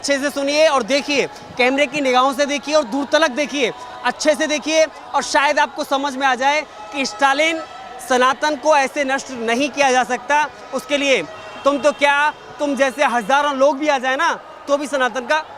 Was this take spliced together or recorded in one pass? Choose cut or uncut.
uncut